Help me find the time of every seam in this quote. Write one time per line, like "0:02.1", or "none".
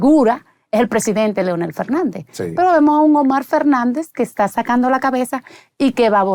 none